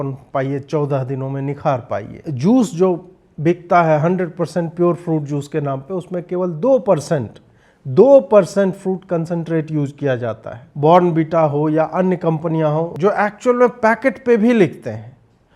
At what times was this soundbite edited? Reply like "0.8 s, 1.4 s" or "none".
2.2 s, 10.6 s, 12.9 s